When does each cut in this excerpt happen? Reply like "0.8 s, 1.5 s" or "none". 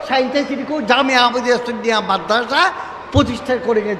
none